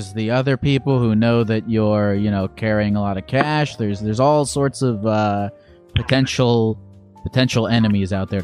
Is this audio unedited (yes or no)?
yes